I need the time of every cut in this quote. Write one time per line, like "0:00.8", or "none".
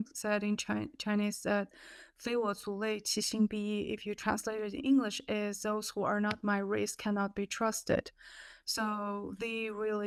none